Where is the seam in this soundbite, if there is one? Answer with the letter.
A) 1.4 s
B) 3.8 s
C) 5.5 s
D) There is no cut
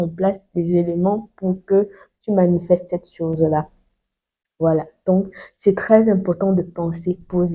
D